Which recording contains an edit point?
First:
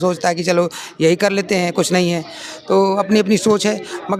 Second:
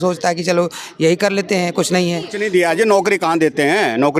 second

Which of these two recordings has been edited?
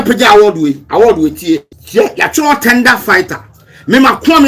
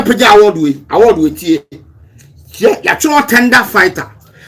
first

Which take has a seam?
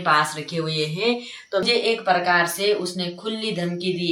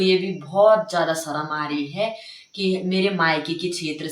first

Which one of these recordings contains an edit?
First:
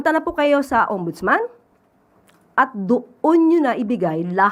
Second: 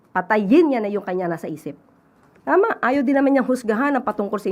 second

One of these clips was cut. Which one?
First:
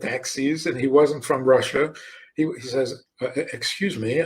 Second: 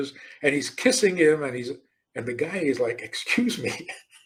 first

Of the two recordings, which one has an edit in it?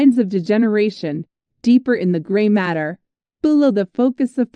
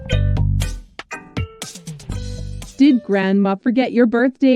second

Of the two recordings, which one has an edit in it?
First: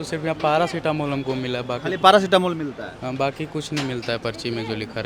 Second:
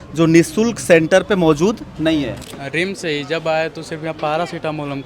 second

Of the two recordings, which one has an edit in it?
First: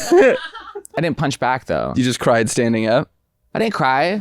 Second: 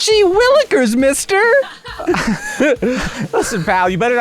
first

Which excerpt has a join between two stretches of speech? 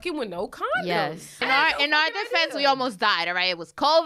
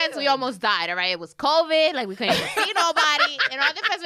first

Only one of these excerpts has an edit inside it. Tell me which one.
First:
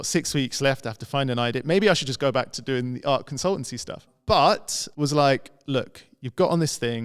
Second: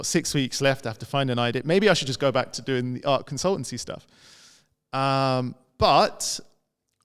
first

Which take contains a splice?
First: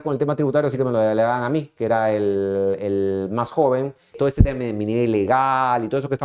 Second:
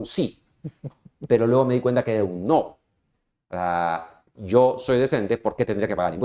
first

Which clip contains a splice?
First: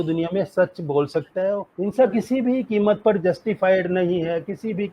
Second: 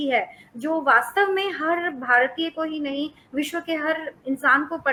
first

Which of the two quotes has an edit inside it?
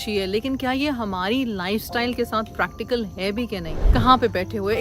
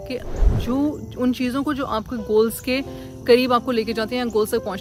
first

